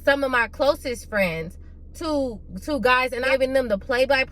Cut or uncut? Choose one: cut